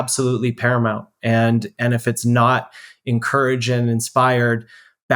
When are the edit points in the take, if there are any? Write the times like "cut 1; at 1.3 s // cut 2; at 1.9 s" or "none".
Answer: none